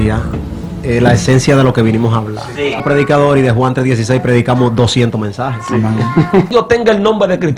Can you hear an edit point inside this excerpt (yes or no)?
yes